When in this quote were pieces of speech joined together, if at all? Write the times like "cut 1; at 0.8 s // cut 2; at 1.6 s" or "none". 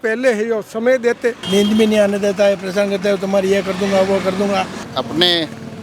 cut 1; at 1.4 s // cut 2; at 4.8 s